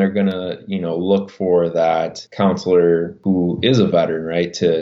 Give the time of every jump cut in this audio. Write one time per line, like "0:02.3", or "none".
0:02.2
0:03.1